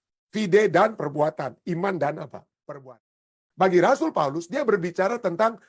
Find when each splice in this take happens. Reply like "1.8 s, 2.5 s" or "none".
3.2 s